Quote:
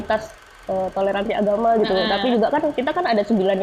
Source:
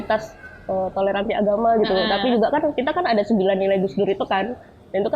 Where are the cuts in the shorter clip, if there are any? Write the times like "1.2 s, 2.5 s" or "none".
none